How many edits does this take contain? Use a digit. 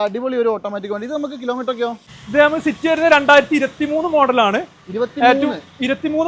1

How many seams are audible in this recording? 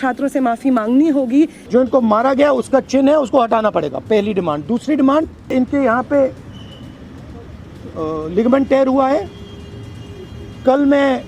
2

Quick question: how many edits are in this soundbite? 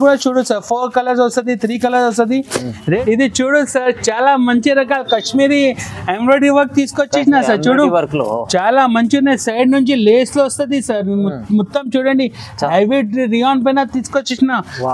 1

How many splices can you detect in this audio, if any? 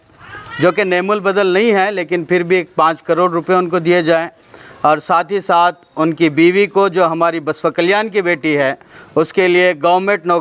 0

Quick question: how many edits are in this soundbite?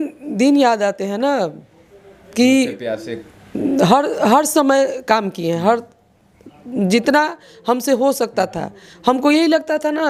0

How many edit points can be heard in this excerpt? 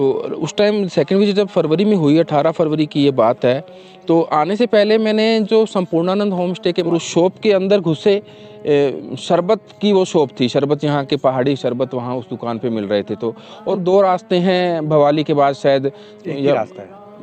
2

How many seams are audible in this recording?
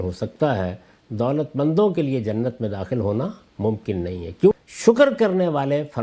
1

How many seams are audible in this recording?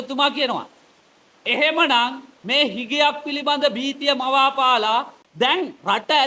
1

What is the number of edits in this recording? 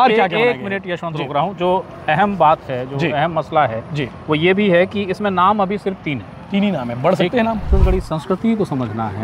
1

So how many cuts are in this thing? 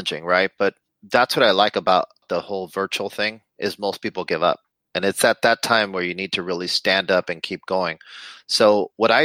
0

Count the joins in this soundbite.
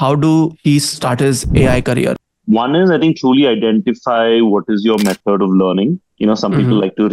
3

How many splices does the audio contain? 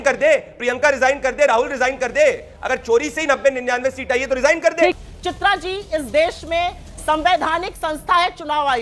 0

